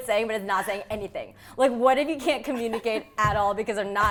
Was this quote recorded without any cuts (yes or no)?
yes